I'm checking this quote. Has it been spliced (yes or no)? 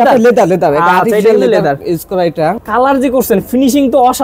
yes